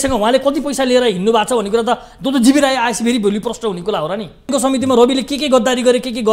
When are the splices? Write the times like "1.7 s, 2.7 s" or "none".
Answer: 4.5 s